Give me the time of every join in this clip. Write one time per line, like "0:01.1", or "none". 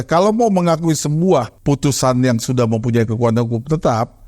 0:01.5